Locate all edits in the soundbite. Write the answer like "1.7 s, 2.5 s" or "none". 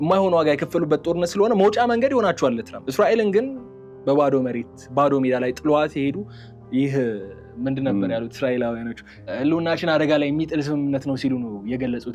2.8 s, 9.3 s